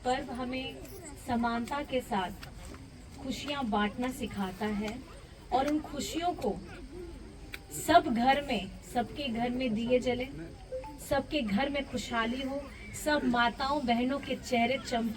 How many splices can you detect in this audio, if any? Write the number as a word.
zero